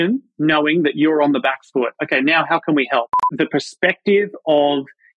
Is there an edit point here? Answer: yes; 1 cut; at 3.2 s

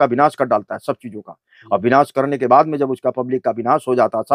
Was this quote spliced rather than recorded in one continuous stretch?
no; 0 cuts

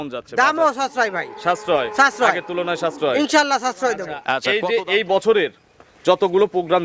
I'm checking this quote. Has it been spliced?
yes; 1 cut; at 4.3 s

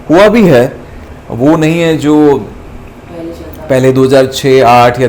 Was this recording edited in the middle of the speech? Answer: no; 0 cuts

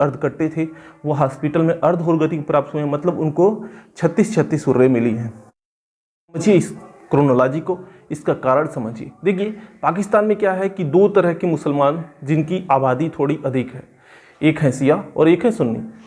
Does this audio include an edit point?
yes; 1 cut; at 6.4 s

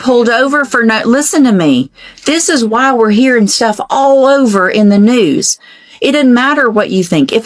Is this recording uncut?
yes; 0 cuts

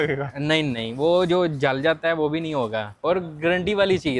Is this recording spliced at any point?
yes; 1 cut; at 2.9 s

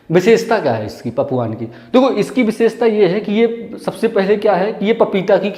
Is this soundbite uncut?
yes; 0 cuts

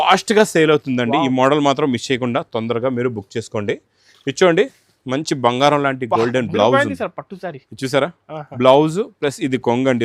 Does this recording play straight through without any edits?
yes; 0 cuts

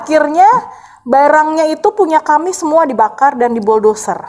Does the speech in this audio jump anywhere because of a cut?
no; 0 cuts

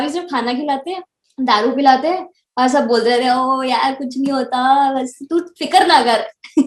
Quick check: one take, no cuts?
yes; 0 cuts

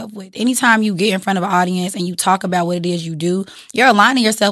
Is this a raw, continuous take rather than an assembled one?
yes; 0 cuts

